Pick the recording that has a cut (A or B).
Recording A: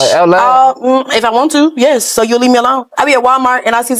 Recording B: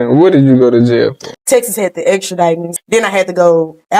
B